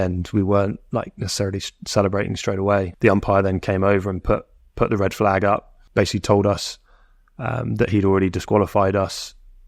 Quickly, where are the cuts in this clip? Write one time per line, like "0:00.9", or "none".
0:02.9
0:05.8

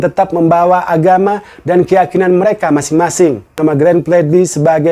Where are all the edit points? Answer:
0:03.6

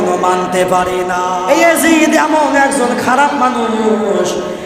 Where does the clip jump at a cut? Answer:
0:01.3

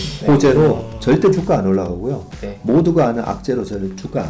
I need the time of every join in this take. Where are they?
none

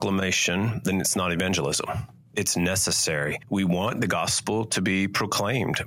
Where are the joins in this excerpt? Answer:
0:02.3
0:03.4

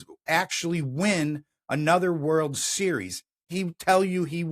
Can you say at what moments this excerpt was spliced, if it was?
0:03.5

